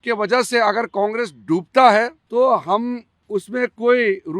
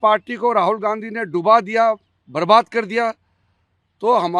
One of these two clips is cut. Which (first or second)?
first